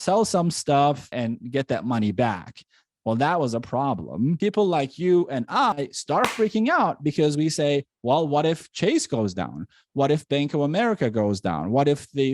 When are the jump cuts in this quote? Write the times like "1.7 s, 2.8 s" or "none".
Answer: 1.1 s, 4.4 s